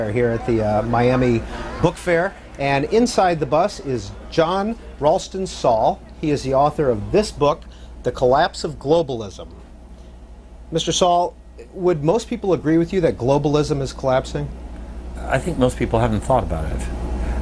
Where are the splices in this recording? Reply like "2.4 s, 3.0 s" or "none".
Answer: 10.1 s